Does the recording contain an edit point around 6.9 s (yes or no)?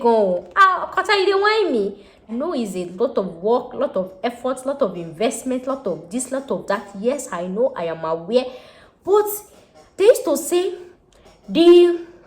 no